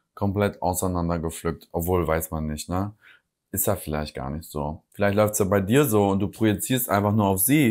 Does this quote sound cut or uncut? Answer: uncut